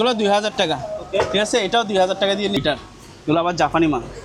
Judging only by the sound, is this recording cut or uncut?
cut